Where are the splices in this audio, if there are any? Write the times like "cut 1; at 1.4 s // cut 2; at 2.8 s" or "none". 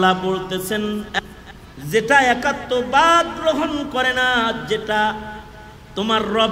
cut 1; at 1.2 s